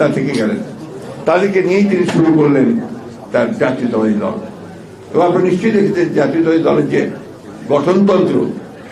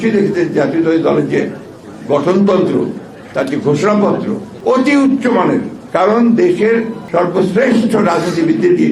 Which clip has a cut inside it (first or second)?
second